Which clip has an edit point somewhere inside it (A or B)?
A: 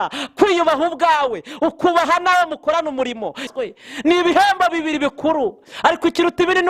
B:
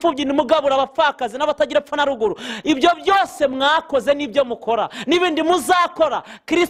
A